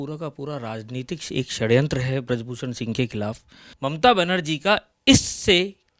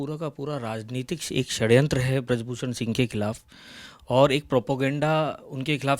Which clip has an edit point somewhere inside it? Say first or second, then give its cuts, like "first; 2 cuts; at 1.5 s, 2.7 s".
first; 1 cut; at 3.6 s